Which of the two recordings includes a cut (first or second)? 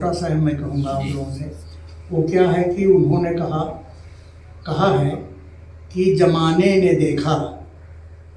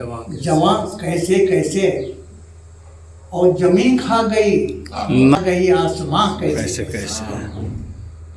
second